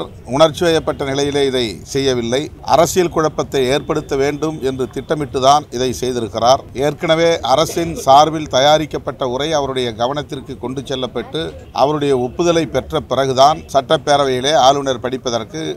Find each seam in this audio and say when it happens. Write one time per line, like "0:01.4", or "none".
0:02.5
0:06.7
0:11.6
0:13.6